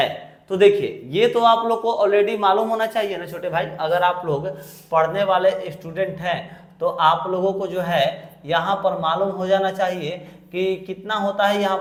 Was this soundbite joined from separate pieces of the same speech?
no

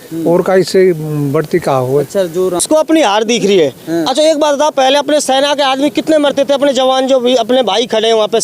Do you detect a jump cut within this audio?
yes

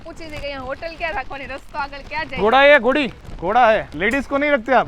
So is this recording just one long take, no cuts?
no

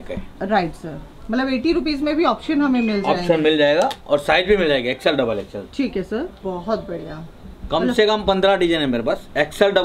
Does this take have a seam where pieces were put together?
yes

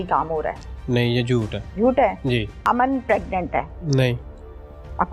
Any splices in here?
yes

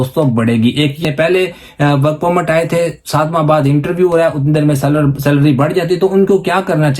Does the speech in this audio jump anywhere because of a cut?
yes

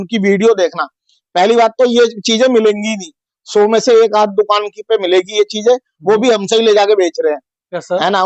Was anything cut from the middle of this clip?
no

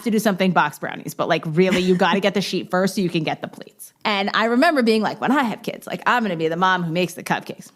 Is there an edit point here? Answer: yes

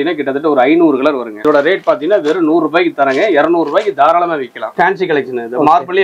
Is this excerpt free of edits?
no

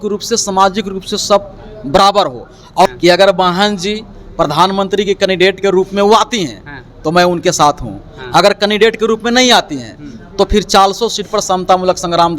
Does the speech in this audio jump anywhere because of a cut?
yes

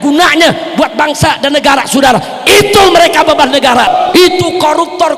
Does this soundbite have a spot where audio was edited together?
yes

